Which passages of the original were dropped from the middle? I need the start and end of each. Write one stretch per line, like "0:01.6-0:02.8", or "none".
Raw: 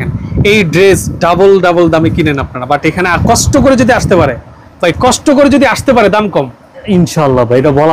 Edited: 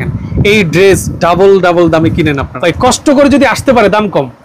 0:02.5-0:04.7